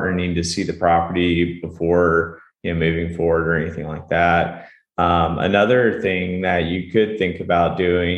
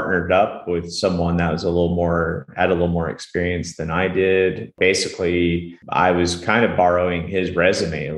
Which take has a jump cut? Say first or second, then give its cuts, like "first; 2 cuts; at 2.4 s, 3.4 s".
second; 2 cuts; at 4.7 s, 5.8 s